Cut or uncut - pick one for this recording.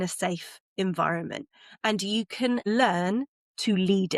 cut